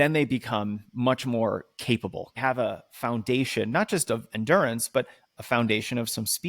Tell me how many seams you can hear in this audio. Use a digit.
1